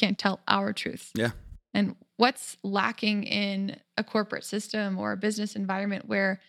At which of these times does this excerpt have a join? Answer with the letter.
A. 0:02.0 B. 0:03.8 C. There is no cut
A